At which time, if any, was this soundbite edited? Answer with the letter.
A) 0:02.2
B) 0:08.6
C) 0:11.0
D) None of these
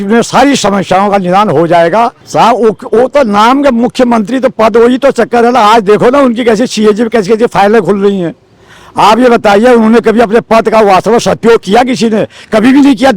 A